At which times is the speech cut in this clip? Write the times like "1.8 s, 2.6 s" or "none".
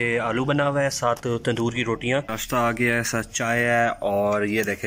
2.4 s

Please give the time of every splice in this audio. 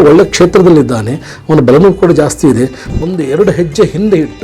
2.8 s

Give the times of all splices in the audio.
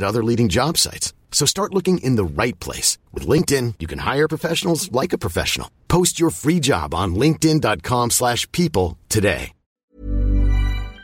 10.0 s

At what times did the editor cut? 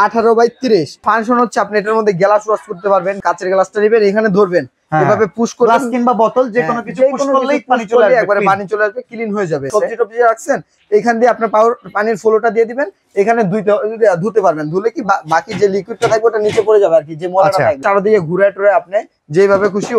1.0 s, 3.2 s, 9.7 s, 17.8 s

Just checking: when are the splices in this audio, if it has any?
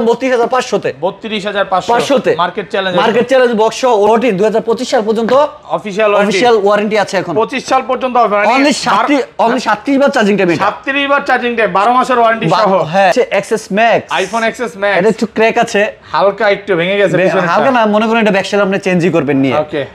4.1 s, 13.1 s

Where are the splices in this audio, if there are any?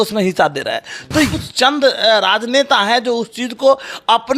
1.3 s

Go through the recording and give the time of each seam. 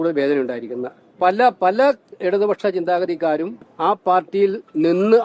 1.0 s, 3.6 s

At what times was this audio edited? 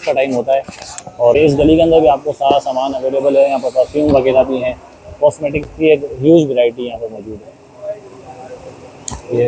1.3 s

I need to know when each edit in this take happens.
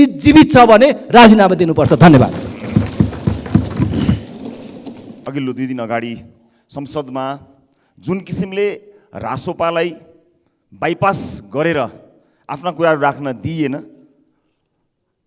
none

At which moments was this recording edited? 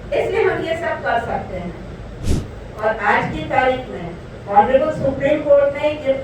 2.2 s

